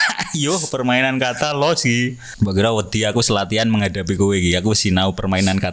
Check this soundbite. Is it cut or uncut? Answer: cut